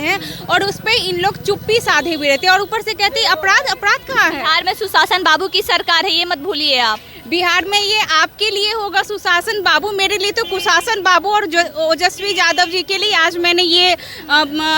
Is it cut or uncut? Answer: uncut